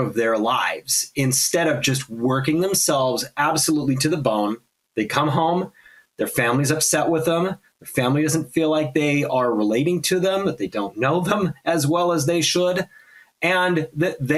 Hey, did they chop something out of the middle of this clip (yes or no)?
no